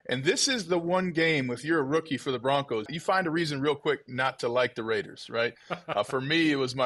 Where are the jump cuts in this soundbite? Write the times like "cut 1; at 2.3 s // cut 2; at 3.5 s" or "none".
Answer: cut 1; at 2.9 s